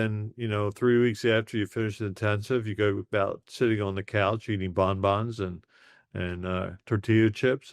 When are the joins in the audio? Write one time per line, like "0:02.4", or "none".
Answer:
none